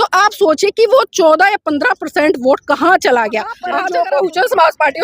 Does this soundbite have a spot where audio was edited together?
yes; 1 cut; at 3.6 s

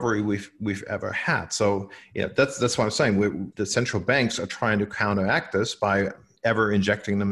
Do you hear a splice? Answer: yes; 2 cuts; at 3.5 s, 6.2 s

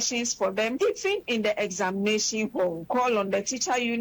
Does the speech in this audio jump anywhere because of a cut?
yes; 2 cuts; at 0.8 s, 2.9 s

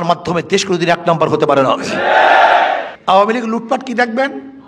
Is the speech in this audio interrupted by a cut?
yes; 1 cut; at 2.9 s

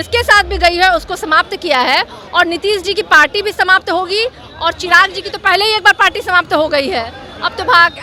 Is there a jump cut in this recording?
no; 0 cuts

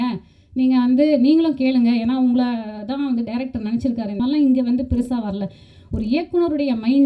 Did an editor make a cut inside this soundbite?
yes; 1 cut; at 4.2 s

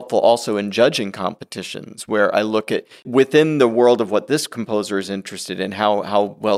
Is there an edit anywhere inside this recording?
yes; 1 cut; at 3.0 s

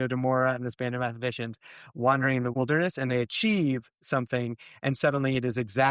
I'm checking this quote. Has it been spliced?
yes; 1 cut; at 2.5 s

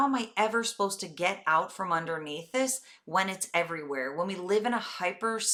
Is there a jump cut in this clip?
no; 0 cuts

